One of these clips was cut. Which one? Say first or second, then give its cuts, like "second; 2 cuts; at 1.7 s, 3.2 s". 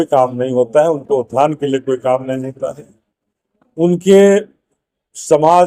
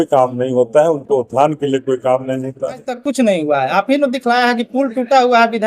second; 1 cut; at 2.9 s